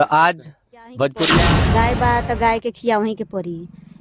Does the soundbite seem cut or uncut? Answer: cut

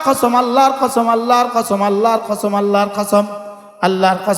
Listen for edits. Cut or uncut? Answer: uncut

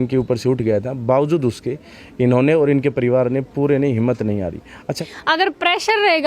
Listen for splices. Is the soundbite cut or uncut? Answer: cut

